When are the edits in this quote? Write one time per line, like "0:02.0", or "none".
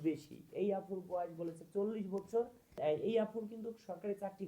0:02.8